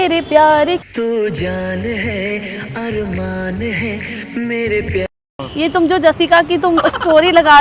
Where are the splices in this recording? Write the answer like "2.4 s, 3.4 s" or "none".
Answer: 5.4 s